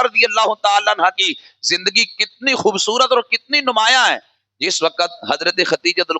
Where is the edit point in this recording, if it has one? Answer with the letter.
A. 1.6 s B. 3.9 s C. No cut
C